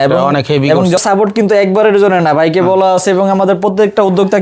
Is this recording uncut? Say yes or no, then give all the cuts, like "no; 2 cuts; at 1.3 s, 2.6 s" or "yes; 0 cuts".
no; 1 cut; at 1.0 s